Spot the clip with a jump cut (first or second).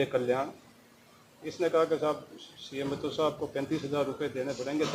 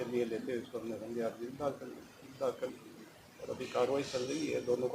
second